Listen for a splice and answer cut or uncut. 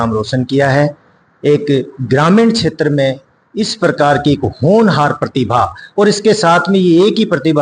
uncut